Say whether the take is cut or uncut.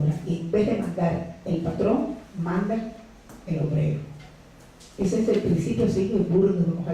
cut